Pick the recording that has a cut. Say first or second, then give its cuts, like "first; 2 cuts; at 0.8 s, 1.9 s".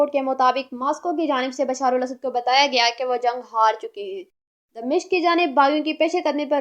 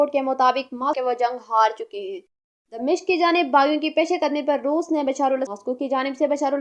second; 2 cuts; at 1.0 s, 5.5 s